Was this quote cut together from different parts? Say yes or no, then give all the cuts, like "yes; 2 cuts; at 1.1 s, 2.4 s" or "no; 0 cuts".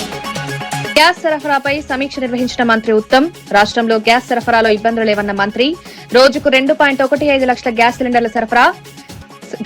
yes; 1 cut; at 0.9 s